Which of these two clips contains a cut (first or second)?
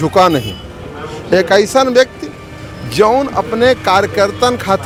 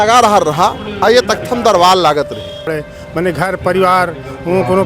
second